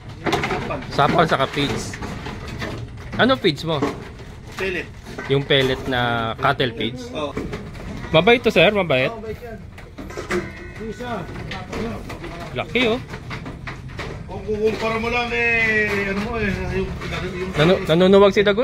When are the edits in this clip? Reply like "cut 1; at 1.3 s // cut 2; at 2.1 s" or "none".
cut 1; at 7.3 s